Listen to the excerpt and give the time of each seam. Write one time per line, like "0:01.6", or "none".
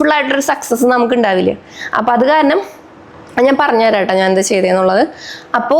none